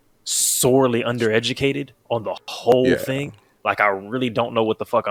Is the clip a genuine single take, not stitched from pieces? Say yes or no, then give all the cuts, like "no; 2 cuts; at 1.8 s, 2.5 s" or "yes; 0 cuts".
yes; 0 cuts